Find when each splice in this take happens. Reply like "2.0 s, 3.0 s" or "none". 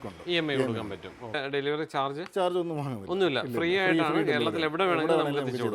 1.3 s